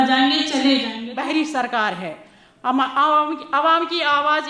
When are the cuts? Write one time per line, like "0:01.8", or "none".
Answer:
0:01.1